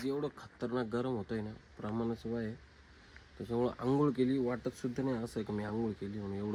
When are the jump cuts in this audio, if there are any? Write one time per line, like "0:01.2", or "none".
none